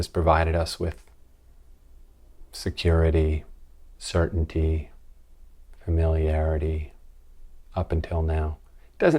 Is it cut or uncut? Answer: uncut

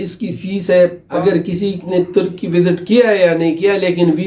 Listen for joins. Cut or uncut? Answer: cut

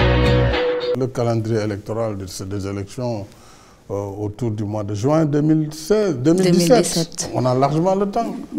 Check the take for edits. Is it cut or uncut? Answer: cut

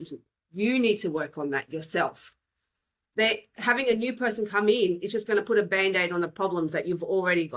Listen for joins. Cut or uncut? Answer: uncut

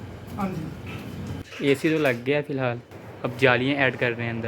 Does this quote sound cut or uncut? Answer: cut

